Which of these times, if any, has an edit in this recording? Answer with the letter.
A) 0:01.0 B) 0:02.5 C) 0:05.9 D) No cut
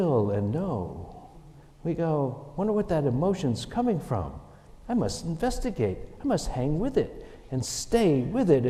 D